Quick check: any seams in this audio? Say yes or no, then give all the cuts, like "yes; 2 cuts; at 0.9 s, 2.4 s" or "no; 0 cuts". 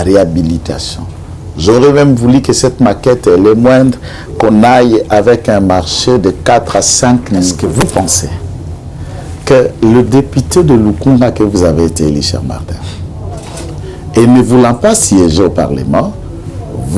yes; 1 cut; at 7.6 s